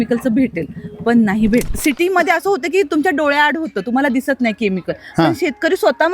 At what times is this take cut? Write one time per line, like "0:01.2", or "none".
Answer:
0:01.6